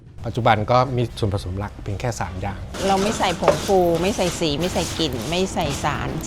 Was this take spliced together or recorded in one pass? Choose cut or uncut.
cut